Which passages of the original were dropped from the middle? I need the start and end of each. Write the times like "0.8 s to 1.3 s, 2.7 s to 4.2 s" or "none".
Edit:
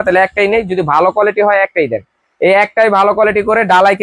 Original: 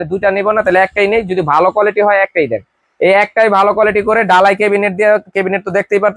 none

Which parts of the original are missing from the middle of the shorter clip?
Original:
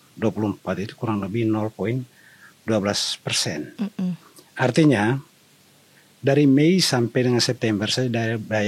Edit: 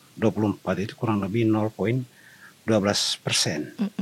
none

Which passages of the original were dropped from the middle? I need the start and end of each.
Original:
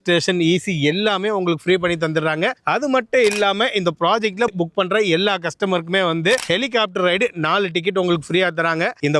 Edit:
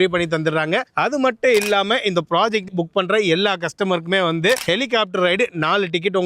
4.4 s to 4.5 s

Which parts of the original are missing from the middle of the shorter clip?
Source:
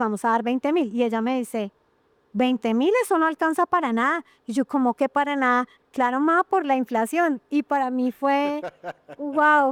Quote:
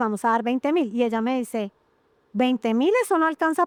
none

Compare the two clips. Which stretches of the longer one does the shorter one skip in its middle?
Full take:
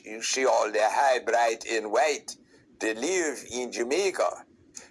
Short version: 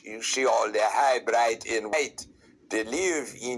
1.9 s to 2.0 s

